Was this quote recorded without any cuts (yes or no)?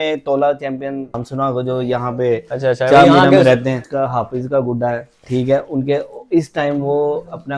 no